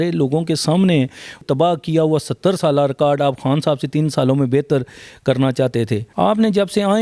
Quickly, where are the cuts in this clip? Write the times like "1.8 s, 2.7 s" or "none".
1.4 s, 6.0 s